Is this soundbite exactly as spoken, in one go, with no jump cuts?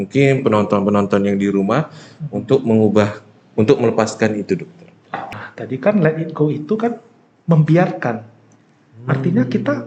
no; 1 cut; at 5.3 s

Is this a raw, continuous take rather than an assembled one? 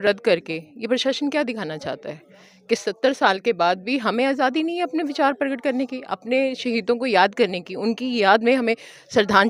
yes; 0 cuts

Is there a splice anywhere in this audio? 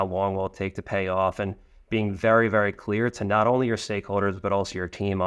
no; 0 cuts

